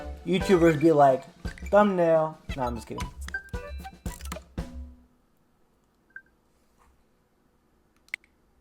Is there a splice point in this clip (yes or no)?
no